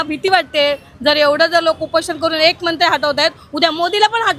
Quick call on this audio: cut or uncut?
uncut